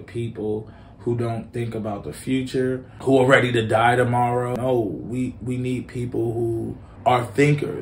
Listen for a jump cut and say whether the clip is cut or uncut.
cut